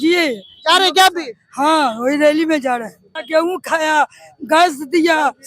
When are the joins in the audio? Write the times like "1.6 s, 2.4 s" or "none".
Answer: 3.2 s